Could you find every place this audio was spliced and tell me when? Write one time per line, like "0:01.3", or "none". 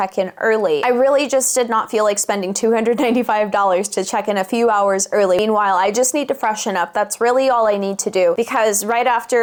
none